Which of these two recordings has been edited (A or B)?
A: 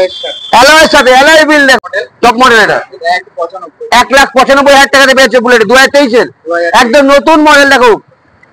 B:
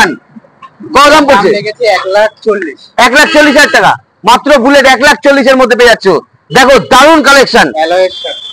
A